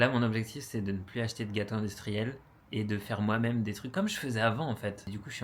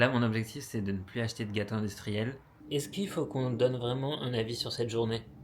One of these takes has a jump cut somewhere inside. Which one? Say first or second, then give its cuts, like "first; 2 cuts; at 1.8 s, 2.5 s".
second; 1 cut; at 2.6 s